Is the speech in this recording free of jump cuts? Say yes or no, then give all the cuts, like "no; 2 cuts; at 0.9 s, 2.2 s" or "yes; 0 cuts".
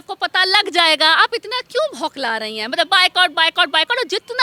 yes; 0 cuts